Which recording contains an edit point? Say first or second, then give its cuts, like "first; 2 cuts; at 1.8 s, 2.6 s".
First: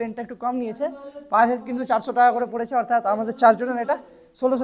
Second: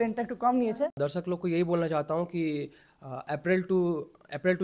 second; 1 cut; at 1.0 s